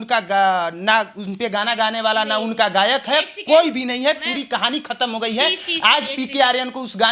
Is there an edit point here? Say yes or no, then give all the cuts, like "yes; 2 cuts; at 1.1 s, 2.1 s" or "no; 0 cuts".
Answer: no; 0 cuts